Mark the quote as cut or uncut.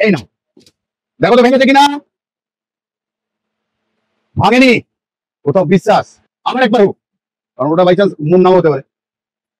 uncut